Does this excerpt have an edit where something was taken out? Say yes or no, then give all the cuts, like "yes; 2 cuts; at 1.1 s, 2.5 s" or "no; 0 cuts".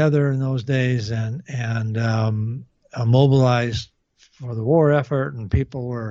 no; 0 cuts